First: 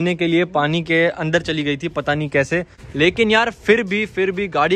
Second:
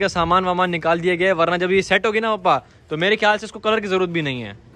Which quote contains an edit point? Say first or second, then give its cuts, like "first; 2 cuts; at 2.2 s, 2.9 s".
first; 1 cut; at 2.8 s